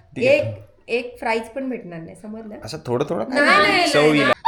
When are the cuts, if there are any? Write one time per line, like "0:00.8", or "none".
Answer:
none